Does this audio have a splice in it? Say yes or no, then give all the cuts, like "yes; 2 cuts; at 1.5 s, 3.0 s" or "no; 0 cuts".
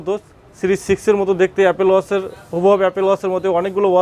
no; 0 cuts